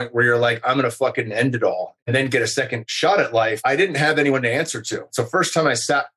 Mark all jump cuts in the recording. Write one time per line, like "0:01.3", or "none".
0:01.9
0:02.8
0:03.6
0:05.1